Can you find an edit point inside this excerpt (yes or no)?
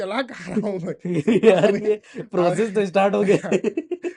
no